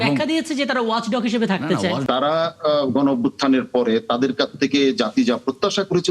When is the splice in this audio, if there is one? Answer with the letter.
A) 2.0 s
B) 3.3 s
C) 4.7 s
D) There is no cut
A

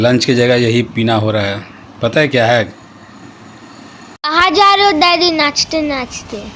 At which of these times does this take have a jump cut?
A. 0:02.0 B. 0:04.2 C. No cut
B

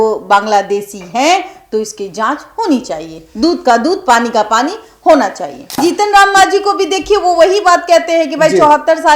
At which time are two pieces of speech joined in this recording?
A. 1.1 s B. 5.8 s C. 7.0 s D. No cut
B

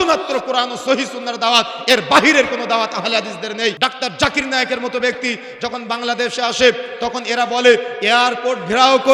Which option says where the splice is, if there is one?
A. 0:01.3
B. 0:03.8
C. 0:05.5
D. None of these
B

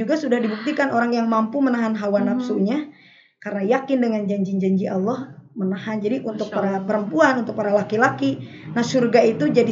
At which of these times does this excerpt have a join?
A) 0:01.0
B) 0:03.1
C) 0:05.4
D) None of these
D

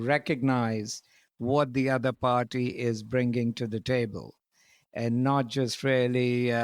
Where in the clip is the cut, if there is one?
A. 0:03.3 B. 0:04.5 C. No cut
C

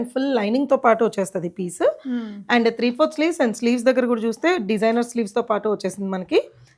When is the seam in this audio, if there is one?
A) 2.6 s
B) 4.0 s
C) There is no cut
C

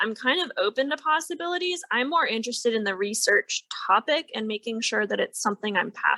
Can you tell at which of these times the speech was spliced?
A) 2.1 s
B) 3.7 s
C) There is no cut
C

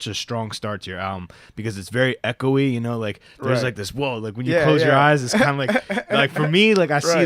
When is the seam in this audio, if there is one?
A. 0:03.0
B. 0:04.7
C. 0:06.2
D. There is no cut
D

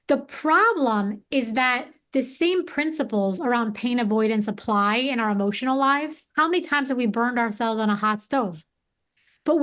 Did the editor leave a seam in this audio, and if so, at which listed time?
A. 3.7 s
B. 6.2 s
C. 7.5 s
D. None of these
B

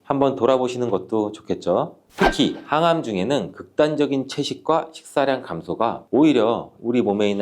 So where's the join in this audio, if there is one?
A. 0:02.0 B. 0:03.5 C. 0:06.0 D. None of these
A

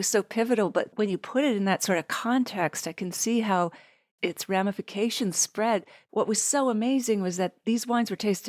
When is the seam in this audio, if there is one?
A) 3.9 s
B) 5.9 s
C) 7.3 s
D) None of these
B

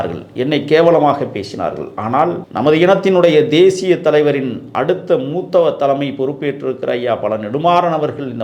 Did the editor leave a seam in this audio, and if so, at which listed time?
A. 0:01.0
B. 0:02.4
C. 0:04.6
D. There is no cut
B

